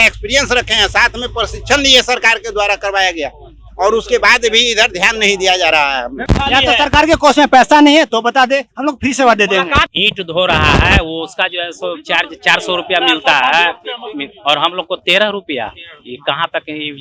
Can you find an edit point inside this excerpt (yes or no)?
yes